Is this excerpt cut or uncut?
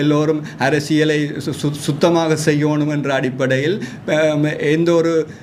uncut